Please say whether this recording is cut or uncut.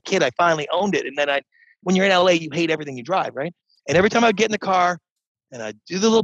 uncut